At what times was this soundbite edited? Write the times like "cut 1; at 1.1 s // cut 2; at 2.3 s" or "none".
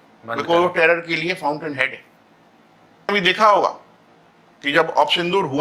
cut 1; at 3.1 s